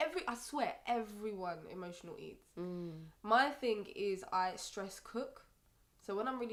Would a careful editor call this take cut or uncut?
uncut